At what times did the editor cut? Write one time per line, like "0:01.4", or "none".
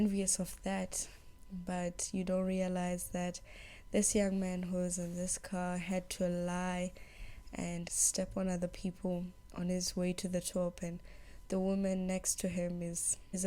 none